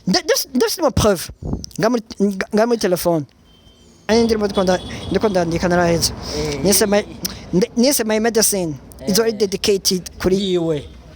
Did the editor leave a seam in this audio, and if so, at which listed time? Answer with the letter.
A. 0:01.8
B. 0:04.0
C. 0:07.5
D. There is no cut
B